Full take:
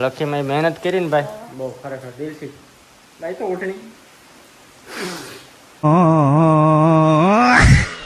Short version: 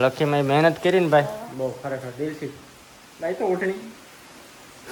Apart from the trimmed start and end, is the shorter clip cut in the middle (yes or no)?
no